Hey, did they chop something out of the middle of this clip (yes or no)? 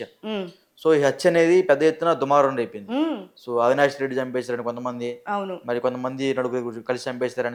no